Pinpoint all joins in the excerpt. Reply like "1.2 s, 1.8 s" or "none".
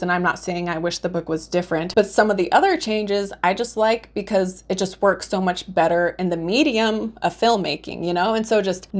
1.9 s